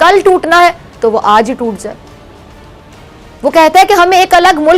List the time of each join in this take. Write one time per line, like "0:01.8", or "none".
none